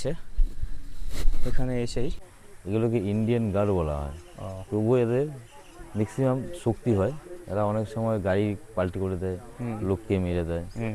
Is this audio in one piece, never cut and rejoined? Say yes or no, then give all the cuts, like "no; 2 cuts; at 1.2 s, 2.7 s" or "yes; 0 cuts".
no; 1 cut; at 2.2 s